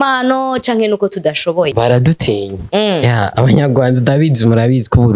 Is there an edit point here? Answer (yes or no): yes